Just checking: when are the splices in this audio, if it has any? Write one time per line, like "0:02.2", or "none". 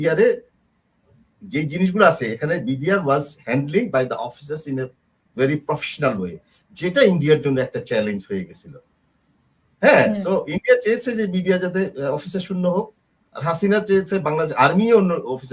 none

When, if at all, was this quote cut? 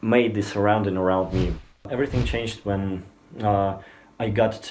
0:01.8

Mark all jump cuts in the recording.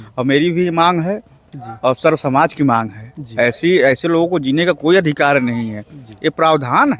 none

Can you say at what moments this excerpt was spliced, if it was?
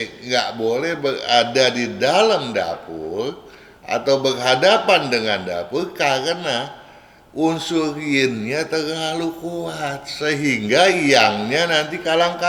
none

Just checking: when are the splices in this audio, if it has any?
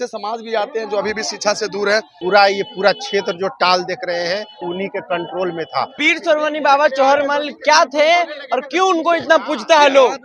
0:02.1
0:04.6
0:06.0

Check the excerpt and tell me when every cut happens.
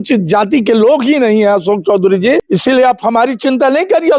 0:02.5

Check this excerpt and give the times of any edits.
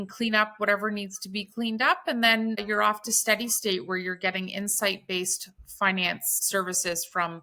0:02.6
0:06.4

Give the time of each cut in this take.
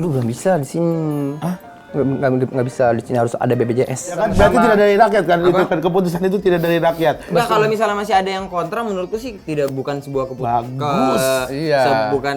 0:04.2

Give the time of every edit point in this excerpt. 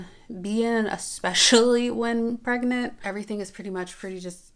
0:03.0

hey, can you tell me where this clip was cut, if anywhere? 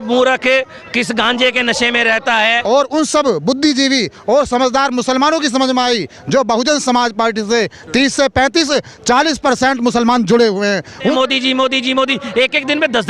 0:02.6
0:11.1

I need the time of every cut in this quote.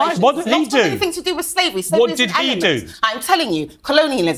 none

